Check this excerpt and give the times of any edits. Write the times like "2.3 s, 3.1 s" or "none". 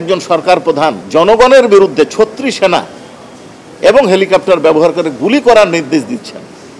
1.0 s